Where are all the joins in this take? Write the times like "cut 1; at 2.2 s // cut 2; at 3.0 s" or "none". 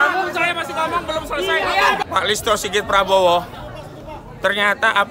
cut 1; at 2.0 s